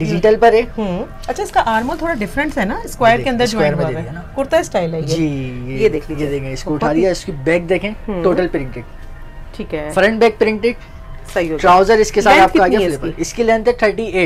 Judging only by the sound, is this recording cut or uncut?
uncut